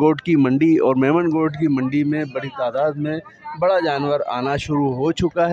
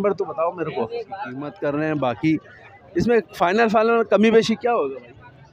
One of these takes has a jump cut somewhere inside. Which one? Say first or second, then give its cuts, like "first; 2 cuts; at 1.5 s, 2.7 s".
second; 1 cut; at 1.5 s